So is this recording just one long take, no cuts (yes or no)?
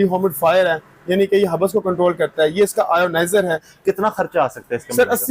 no